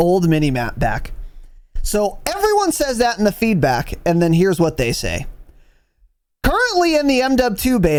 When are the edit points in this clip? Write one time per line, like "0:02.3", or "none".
none